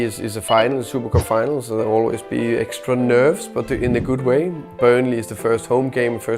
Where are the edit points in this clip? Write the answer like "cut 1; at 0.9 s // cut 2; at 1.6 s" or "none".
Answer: none